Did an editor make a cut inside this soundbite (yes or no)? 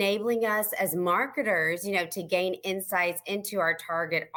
no